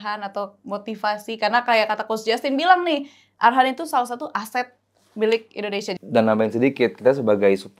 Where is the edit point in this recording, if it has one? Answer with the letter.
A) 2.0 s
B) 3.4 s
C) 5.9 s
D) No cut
C